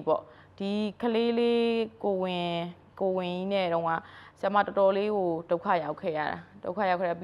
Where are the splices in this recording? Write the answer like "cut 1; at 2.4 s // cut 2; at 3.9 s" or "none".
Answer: none